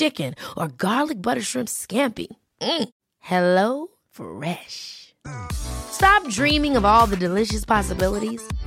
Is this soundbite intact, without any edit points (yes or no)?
yes